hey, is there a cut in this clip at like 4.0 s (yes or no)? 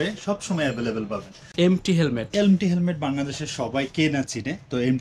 no